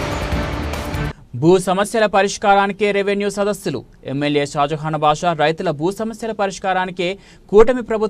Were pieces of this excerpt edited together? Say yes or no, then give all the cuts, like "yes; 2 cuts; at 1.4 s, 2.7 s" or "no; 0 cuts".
yes; 1 cut; at 1.0 s